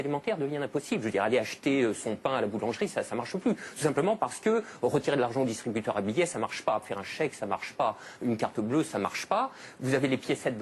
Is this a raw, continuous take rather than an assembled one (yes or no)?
yes